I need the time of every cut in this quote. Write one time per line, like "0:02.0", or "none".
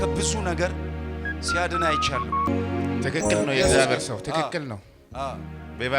0:02.5